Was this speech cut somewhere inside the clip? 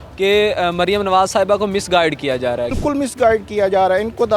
yes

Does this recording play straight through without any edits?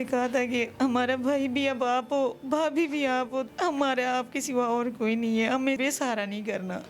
no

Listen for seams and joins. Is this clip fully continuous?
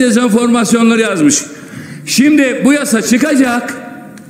yes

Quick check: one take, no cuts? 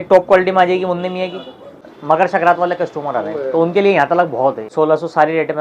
no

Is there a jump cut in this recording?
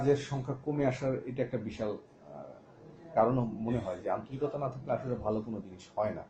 no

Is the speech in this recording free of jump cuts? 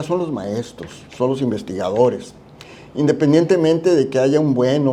yes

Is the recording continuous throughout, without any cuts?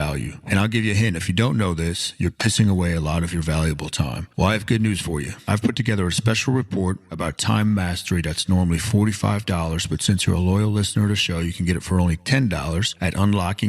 yes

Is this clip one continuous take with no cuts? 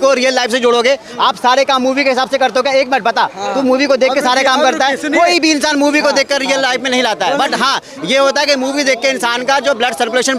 yes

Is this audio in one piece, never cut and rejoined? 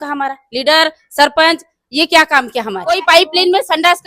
no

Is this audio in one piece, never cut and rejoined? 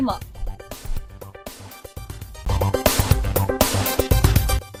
yes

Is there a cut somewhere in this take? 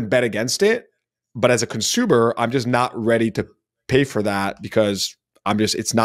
no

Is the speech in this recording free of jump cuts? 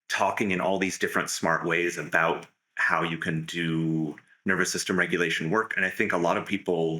yes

